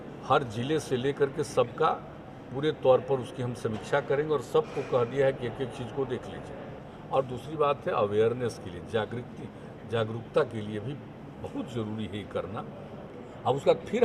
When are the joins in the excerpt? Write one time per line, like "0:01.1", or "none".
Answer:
0:06.9
0:13.0